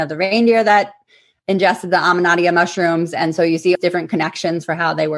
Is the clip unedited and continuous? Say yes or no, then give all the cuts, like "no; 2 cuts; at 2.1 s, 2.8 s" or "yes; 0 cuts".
no; 1 cut; at 3.8 s